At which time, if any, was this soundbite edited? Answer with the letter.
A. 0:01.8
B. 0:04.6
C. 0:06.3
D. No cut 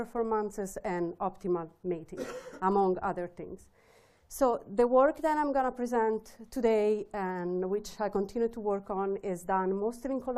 A